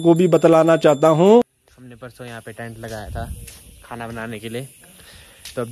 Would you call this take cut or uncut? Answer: cut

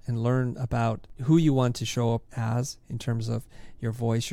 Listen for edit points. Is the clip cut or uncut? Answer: cut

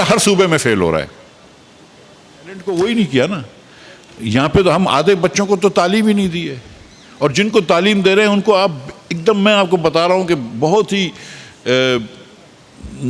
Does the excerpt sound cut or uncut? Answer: cut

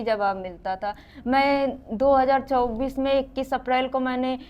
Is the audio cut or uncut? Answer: uncut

